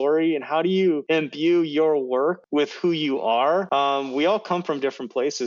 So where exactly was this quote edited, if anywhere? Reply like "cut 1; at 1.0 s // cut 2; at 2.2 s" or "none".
cut 1; at 1.0 s // cut 2; at 2.4 s // cut 3; at 3.7 s